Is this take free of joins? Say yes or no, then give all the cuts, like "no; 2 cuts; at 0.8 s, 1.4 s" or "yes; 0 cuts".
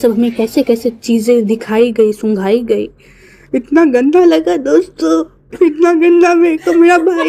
yes; 0 cuts